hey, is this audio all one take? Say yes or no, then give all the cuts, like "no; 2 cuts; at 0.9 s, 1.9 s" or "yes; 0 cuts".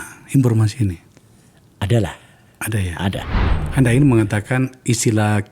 no; 1 cut; at 3.4 s